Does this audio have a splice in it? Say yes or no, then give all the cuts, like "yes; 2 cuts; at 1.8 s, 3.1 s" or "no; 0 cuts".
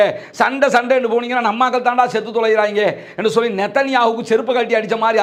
no; 0 cuts